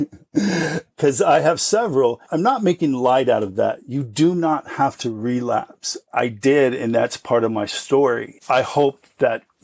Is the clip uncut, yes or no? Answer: no